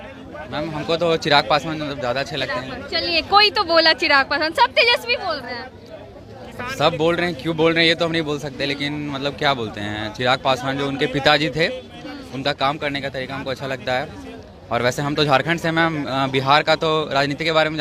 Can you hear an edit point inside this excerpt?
no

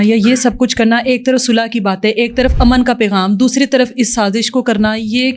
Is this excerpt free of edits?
yes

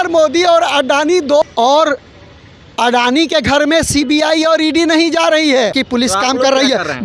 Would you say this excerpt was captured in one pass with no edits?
no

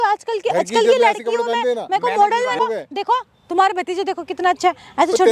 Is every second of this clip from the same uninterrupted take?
no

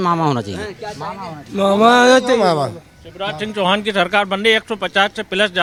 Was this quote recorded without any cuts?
yes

